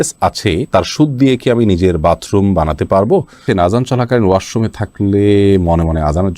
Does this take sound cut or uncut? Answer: cut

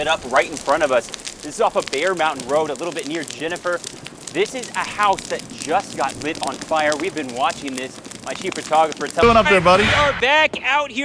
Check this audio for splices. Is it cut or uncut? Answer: uncut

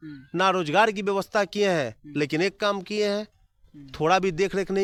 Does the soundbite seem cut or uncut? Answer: uncut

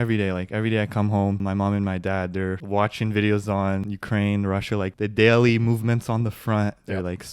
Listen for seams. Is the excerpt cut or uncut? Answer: cut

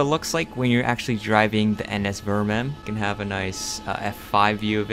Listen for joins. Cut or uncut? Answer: cut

